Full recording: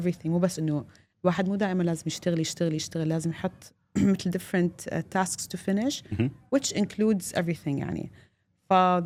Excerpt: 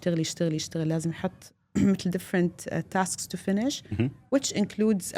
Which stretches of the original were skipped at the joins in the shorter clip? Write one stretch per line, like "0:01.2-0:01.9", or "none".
none